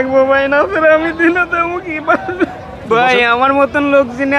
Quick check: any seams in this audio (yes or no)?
yes